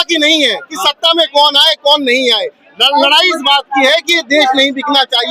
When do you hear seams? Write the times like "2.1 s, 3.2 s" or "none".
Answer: none